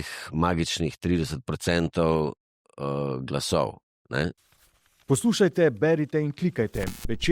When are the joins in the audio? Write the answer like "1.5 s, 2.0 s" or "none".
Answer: 4.4 s

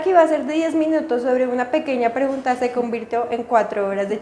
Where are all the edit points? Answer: none

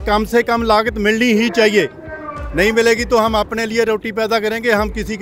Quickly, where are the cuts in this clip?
none

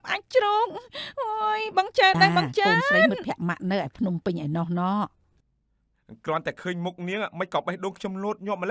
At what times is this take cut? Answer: 3.1 s

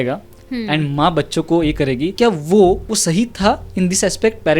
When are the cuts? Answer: 2.1 s, 2.9 s

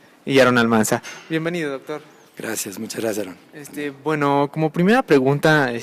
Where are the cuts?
none

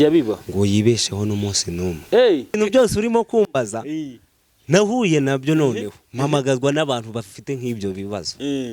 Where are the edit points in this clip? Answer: 2.5 s

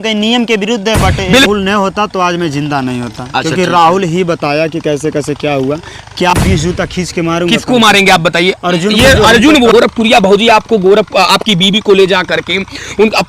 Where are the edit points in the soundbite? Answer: 1.4 s, 6.3 s, 9.7 s

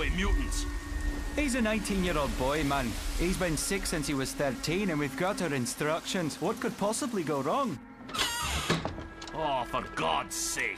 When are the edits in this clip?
2.2 s

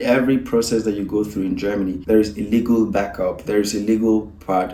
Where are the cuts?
none

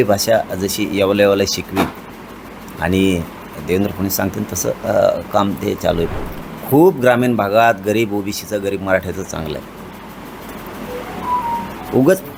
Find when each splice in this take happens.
6.1 s

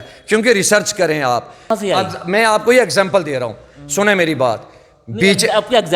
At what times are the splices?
1.7 s

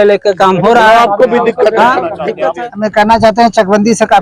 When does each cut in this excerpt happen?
2.3 s

